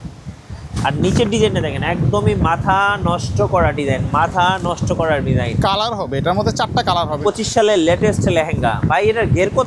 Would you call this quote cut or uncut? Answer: cut